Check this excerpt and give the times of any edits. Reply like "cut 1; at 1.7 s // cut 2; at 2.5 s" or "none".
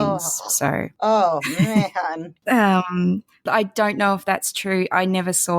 cut 1; at 0.9 s // cut 2; at 2.3 s // cut 3; at 3.4 s